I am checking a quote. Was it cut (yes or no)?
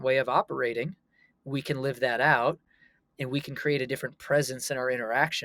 no